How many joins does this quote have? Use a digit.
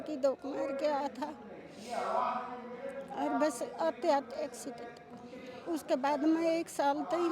1